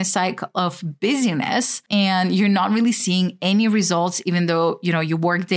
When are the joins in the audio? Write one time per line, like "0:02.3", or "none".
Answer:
0:01.8